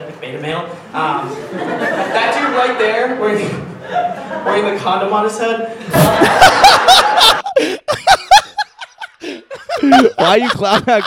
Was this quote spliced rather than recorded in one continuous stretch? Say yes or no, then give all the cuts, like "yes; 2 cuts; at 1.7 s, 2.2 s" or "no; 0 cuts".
yes; 1 cut; at 1.2 s